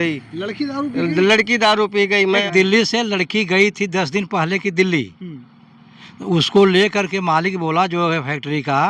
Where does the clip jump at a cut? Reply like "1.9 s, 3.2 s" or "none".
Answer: 2.4 s